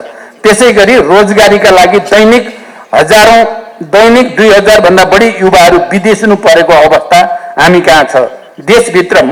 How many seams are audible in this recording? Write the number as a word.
zero